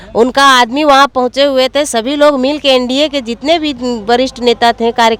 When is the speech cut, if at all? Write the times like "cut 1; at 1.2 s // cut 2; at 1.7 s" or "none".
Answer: none